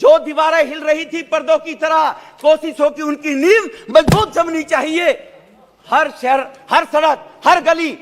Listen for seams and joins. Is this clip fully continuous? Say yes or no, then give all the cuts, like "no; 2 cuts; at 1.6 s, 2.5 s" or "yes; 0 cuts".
yes; 0 cuts